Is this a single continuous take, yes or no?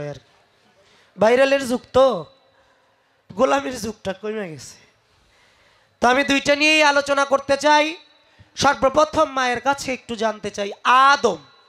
yes